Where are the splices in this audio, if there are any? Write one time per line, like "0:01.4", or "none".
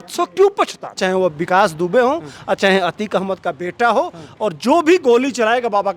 0:00.9